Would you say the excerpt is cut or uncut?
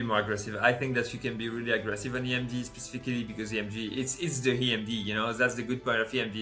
uncut